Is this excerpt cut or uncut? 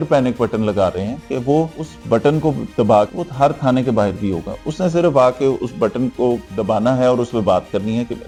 uncut